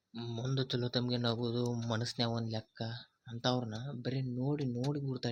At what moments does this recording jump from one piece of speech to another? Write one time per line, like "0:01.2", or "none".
none

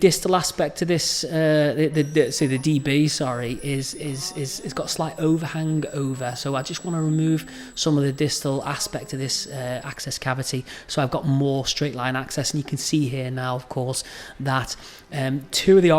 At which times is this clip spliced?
none

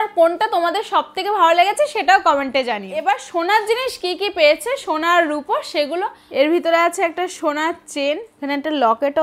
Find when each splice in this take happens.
0:03.0
0:06.2
0:08.3

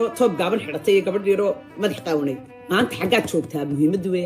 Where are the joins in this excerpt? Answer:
0:02.5

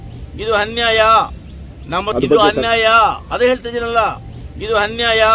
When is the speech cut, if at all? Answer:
0:02.1

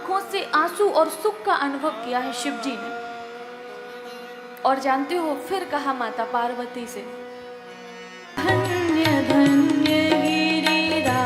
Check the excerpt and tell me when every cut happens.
none

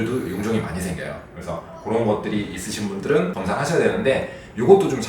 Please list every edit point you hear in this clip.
none

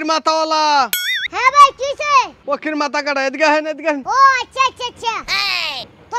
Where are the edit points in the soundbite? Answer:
0:01.2

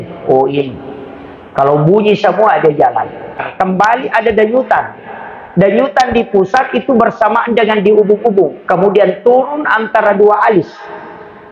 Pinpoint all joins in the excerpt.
0:03.4

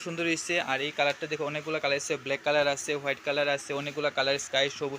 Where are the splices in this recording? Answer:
none

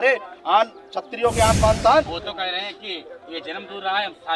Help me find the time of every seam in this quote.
0:02.2

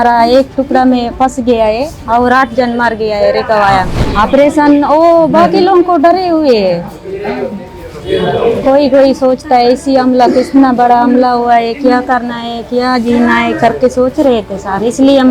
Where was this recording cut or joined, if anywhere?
0:04.0

